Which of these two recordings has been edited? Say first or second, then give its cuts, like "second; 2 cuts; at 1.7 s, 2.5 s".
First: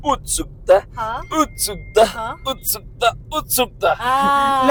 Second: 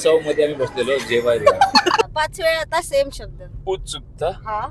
second; 1 cut; at 2.0 s